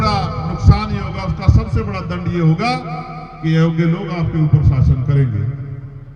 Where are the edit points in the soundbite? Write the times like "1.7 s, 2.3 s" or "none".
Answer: none